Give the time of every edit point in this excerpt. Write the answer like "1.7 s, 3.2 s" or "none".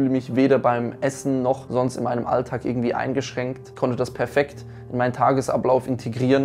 none